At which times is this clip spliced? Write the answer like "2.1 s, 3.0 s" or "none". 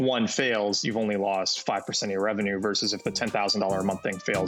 none